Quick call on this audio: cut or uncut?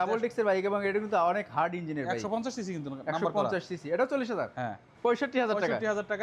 cut